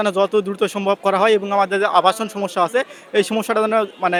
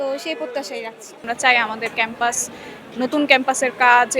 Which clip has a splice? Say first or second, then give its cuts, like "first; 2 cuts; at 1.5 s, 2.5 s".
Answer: second; 1 cut; at 1.2 s